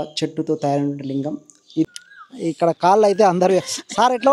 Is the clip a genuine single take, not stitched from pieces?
no; 1 cut; at 1.9 s

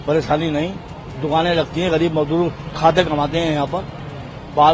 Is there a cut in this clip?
no; 0 cuts

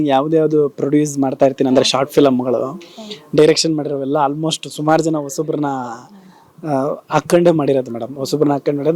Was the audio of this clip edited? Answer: no; 0 cuts

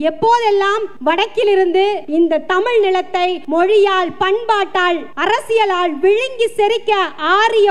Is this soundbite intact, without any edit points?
no; 4 cuts; at 0.9 s, 2.0 s, 3.4 s, 5.1 s

